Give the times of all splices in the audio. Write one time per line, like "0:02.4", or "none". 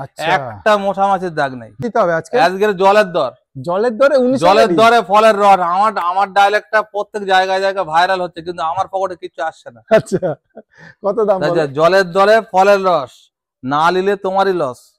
0:01.8